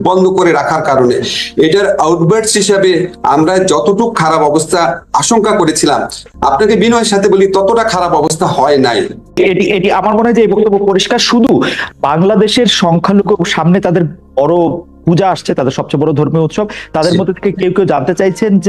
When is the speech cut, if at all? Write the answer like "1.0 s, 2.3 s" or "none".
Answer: 9.4 s